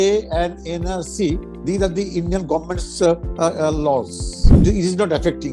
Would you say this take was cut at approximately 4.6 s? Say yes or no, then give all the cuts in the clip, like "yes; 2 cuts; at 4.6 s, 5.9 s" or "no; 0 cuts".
yes; 1 cut; at 4.6 s